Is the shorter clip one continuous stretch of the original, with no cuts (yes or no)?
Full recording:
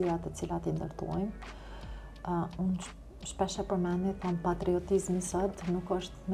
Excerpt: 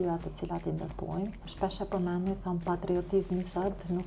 no